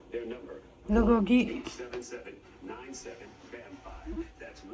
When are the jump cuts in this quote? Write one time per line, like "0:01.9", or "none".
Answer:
none